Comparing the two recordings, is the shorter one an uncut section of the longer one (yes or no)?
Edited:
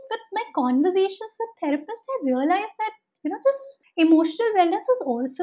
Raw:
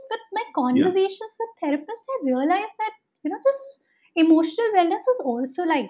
no